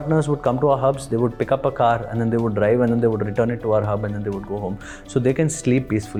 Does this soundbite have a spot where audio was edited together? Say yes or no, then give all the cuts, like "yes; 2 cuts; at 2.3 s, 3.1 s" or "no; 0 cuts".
no; 0 cuts